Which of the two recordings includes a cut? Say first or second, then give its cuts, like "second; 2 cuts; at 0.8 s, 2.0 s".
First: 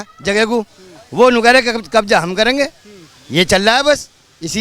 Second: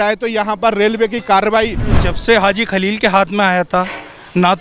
second; 1 cut; at 2.1 s